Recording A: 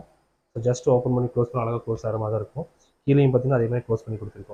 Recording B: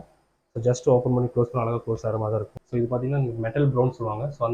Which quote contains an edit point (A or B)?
B